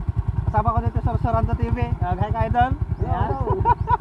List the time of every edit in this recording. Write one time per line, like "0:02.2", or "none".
none

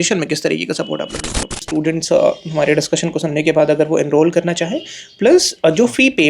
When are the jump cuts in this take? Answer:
0:01.7

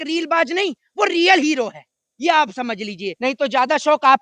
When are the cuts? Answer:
0:03.2

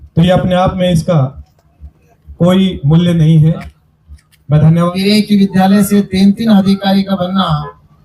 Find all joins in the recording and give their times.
0:04.7

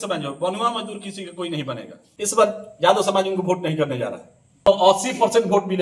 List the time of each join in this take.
0:02.0
0:04.7

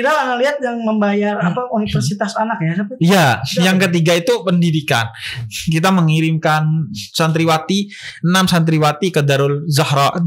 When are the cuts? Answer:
none

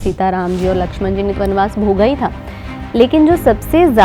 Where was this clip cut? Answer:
0:01.3

